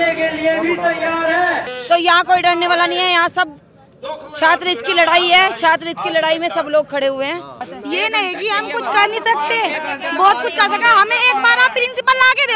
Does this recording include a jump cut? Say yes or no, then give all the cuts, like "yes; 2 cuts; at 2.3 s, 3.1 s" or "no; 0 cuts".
yes; 2 cuts; at 1.7 s, 7.6 s